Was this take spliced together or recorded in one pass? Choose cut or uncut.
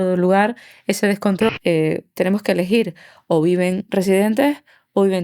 cut